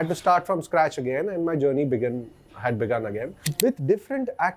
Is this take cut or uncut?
cut